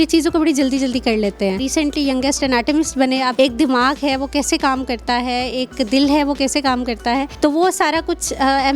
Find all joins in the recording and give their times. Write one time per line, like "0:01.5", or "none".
0:01.6
0:03.3
0:07.3